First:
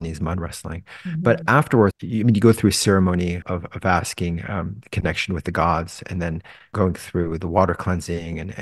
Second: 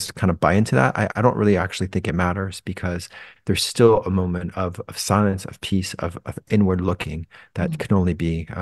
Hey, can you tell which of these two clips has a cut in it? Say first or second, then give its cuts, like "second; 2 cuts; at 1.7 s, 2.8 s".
first; 3 cuts; at 1.9 s, 3.4 s, 6.7 s